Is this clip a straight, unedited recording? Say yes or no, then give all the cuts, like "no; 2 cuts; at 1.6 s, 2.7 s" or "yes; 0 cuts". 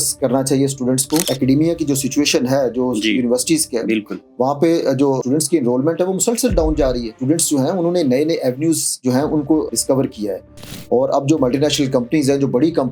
no; 4 cuts; at 1.3 s, 5.2 s, 7.1 s, 9.7 s